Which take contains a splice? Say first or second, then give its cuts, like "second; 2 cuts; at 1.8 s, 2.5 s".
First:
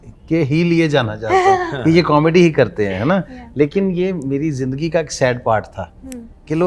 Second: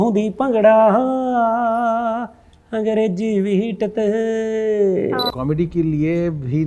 second; 1 cut; at 5.3 s